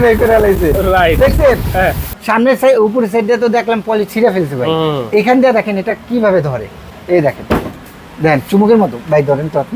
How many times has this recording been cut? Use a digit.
1